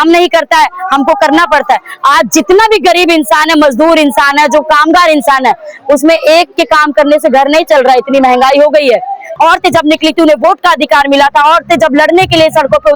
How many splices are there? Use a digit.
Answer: 1